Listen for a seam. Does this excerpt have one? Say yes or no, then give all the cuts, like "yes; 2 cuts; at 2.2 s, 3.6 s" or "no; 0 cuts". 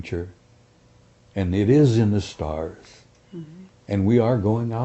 no; 0 cuts